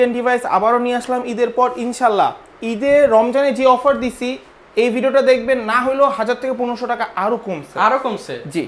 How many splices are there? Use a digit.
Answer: 0